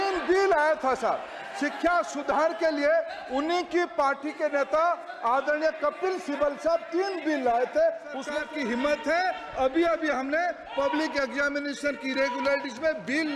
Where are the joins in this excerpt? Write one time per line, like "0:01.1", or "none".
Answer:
0:08.2